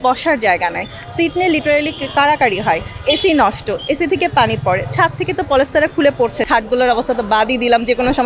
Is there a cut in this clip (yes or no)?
yes